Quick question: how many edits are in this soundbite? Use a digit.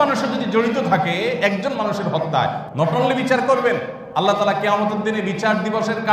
2